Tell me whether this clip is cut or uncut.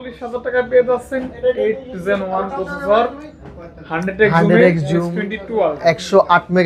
uncut